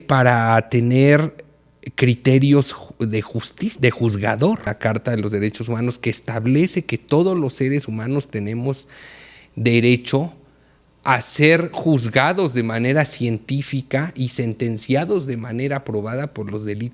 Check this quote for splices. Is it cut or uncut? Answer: cut